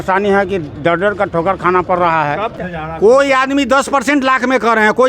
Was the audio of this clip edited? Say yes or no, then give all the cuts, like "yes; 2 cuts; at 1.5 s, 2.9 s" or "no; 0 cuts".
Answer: yes; 1 cut; at 2.5 s